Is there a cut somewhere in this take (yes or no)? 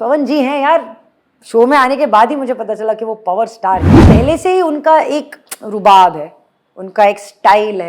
yes